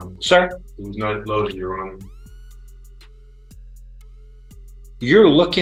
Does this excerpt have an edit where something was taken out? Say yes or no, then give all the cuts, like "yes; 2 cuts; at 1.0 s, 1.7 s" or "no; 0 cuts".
no; 0 cuts